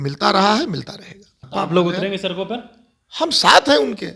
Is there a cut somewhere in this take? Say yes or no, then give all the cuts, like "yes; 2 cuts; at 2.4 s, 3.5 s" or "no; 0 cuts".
yes; 1 cut; at 1.4 s